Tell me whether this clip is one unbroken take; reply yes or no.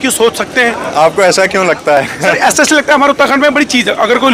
yes